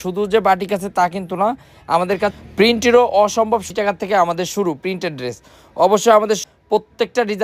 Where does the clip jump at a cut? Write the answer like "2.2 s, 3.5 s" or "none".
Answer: 3.7 s, 6.4 s